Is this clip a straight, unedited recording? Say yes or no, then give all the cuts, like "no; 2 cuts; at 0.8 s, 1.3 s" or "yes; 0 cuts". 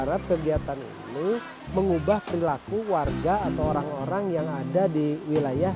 no; 1 cut; at 1.6 s